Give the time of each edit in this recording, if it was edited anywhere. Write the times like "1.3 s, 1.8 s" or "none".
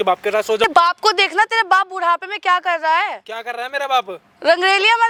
none

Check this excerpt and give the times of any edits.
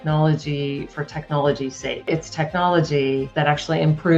2.1 s, 3.3 s

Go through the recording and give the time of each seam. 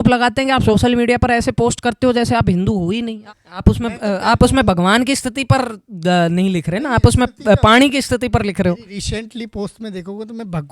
3.2 s

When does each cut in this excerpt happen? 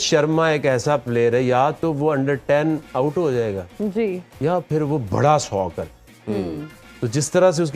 none

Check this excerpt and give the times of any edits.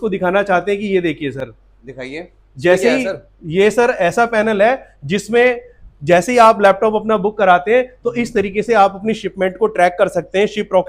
none

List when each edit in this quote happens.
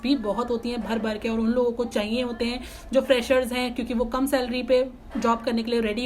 none

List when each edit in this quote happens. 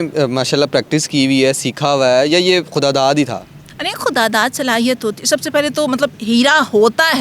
none

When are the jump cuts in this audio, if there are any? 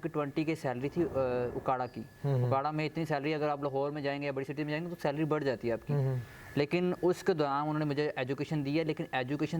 none

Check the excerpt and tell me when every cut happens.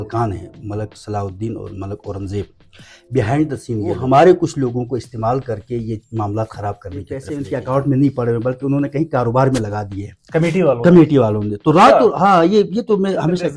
4.0 s, 7.3 s

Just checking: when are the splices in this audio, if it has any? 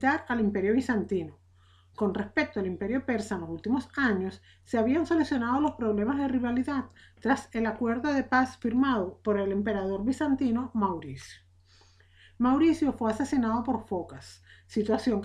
12.8 s

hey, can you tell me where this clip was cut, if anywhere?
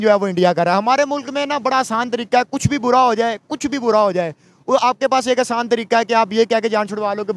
none

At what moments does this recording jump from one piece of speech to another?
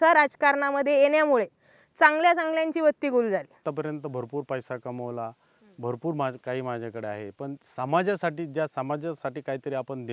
3.6 s

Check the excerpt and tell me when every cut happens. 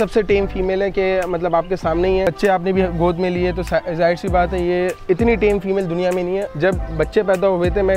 2.3 s, 6.5 s

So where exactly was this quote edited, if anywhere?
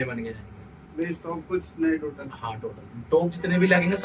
none

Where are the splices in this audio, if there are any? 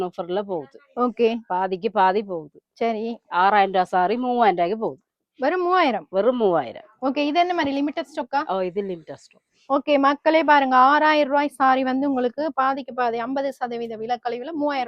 none

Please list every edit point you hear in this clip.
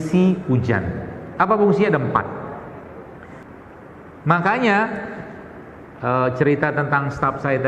3.4 s

